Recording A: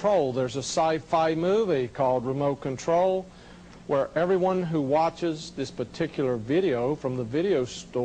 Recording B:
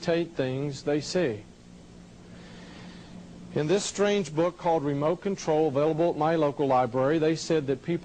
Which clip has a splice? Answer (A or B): B